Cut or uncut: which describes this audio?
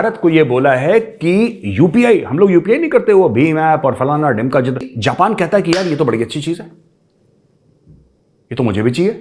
cut